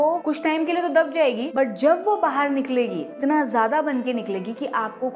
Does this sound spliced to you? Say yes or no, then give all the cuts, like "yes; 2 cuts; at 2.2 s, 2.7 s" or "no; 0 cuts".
yes; 2 cuts; at 1.5 s, 3.1 s